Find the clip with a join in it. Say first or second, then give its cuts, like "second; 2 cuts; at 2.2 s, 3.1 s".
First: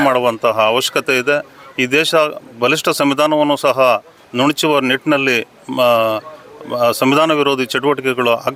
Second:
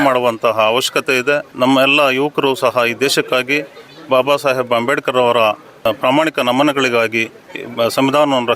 second; 2 cuts; at 1.5 s, 5.9 s